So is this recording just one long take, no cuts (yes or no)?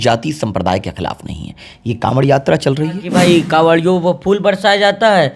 no